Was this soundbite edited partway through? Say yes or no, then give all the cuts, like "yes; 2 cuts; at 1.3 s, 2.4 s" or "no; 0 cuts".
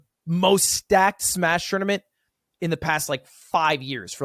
no; 0 cuts